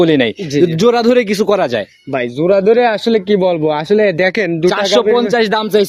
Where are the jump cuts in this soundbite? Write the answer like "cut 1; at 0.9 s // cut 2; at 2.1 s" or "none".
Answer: none